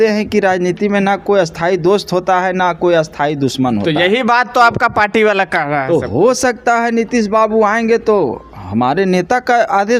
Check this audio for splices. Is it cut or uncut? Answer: uncut